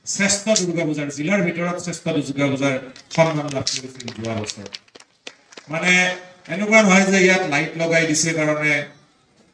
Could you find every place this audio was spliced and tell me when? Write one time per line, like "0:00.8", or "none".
none